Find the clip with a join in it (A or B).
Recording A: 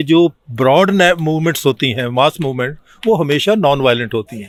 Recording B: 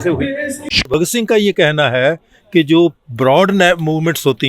B